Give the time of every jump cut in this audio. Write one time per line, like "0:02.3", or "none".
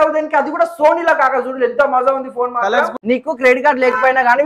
0:02.9

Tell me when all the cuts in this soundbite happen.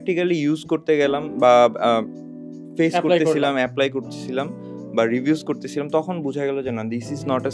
none

